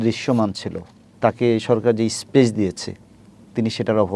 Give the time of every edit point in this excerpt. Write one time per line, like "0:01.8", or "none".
0:01.1